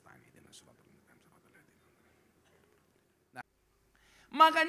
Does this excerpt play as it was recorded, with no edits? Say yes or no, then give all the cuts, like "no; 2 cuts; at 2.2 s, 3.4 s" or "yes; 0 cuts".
no; 1 cut; at 3.4 s